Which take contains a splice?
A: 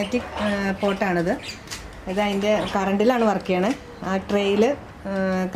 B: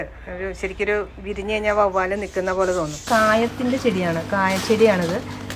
B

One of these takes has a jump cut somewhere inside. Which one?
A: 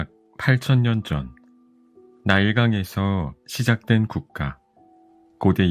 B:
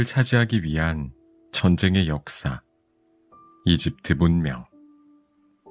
B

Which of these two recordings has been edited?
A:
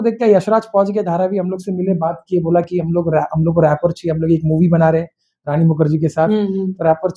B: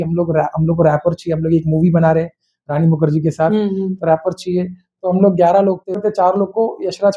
B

